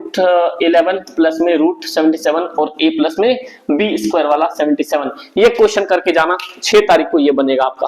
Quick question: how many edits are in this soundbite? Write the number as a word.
zero